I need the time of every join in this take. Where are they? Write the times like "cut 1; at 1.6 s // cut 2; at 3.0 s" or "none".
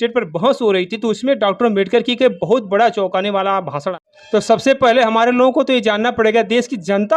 cut 1; at 3.9 s